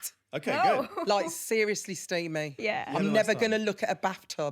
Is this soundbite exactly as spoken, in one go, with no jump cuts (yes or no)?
no